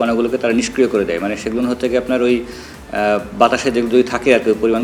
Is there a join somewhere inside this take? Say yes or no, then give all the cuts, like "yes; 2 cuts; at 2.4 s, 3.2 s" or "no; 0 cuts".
no; 0 cuts